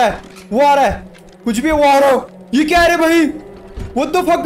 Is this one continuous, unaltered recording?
yes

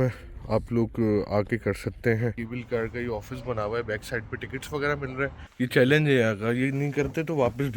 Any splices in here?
yes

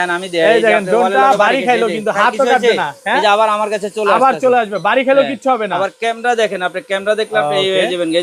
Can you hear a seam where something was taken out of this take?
no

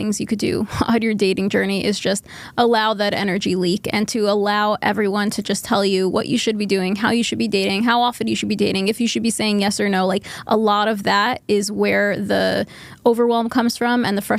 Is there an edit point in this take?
no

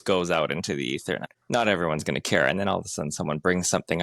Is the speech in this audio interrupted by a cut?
yes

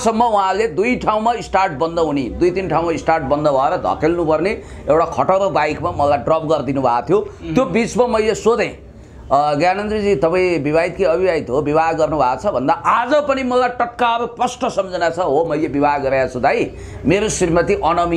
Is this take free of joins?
yes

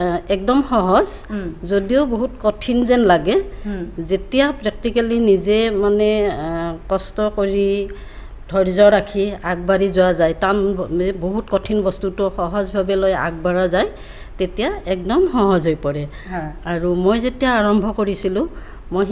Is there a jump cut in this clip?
no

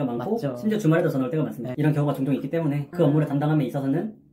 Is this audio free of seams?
no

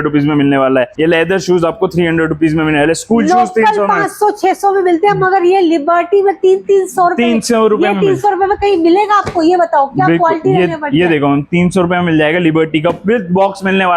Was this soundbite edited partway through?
no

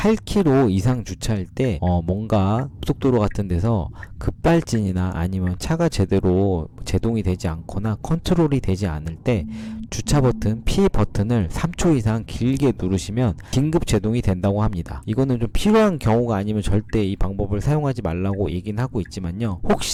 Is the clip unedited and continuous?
yes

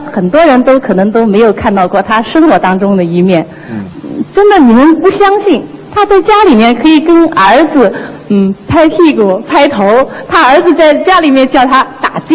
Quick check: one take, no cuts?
yes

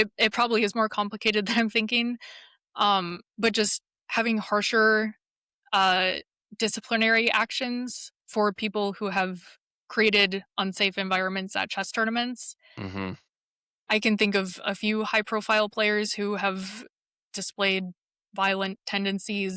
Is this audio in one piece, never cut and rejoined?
yes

